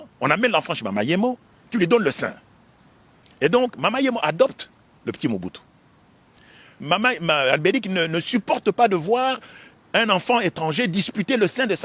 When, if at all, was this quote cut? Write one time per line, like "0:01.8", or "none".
0:06.8